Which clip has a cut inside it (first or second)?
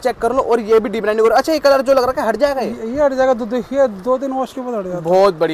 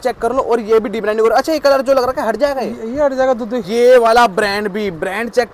second